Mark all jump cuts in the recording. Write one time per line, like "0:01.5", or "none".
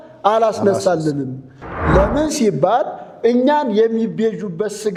none